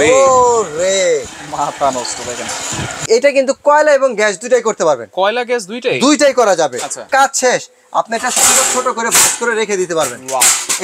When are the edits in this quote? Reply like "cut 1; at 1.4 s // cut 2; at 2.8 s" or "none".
cut 1; at 2.9 s // cut 2; at 7.1 s